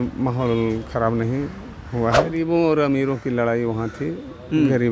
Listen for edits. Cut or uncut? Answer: cut